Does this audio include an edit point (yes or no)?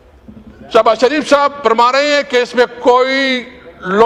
no